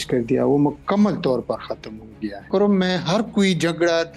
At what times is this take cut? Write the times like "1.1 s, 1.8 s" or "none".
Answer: 2.3 s